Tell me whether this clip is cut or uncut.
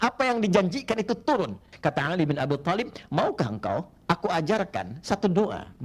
cut